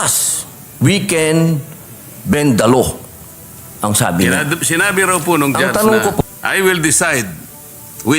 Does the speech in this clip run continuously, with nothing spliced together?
no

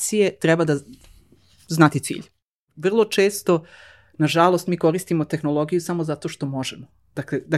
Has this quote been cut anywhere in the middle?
yes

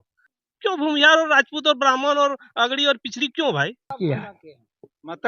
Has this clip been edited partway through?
yes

